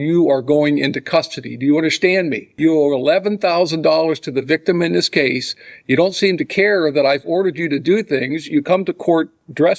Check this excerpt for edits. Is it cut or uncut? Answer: cut